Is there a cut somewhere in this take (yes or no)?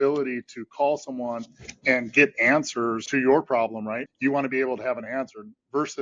yes